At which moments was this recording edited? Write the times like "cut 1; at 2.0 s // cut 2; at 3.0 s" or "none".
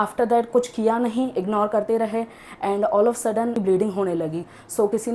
cut 1; at 3.6 s